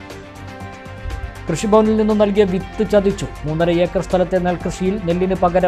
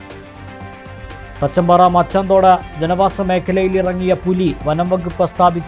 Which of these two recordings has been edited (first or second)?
first